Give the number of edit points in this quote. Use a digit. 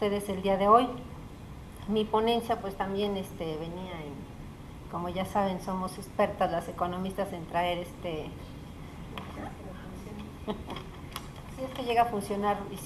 1